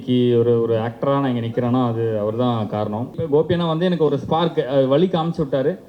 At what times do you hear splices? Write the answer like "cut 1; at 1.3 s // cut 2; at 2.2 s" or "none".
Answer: cut 1; at 3.2 s